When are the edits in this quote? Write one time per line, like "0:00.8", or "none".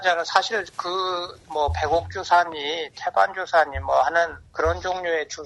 0:01.2